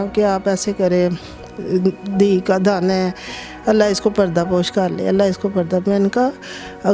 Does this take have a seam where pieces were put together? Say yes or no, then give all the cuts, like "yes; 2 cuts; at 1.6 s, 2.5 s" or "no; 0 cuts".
no; 0 cuts